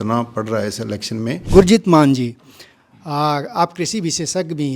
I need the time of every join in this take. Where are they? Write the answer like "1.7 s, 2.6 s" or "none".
none

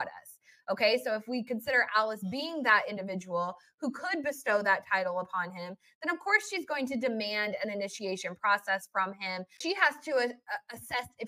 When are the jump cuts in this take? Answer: 9.6 s

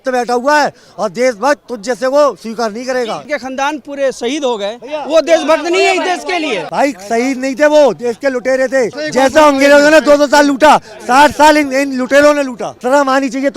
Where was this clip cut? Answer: 3.2 s, 6.6 s, 9.0 s, 12.7 s

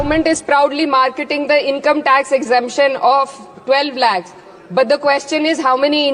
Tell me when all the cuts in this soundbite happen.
none

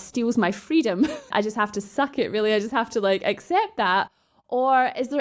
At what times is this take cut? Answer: 1.3 s

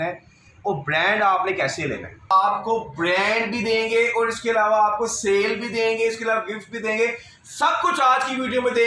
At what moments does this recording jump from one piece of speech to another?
2.3 s

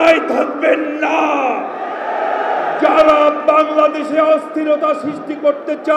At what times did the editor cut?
none

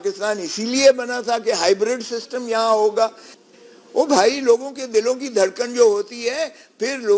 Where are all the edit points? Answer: 3.3 s

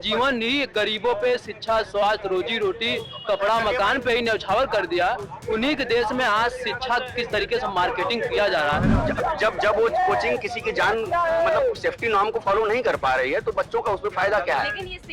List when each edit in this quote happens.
9.0 s

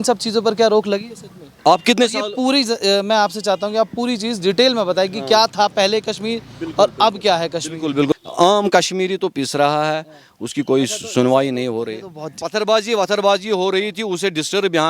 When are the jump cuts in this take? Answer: 8.1 s, 12.4 s

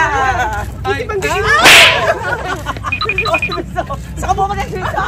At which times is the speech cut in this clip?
none

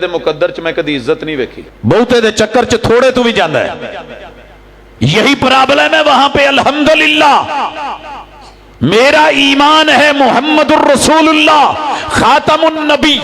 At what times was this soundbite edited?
1.6 s

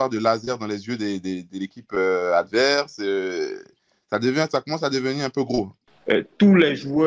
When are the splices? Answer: 5.8 s

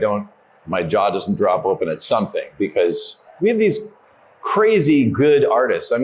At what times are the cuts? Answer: 3.3 s

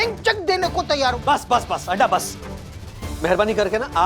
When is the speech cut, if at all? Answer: 1.1 s

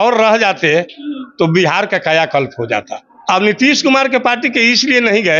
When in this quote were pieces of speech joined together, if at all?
3.2 s

